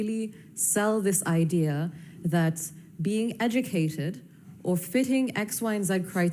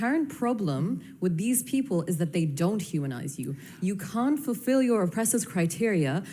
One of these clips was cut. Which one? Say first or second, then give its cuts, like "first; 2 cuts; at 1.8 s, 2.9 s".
second; 1 cut; at 2.5 s